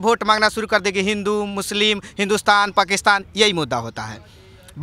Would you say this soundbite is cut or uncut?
uncut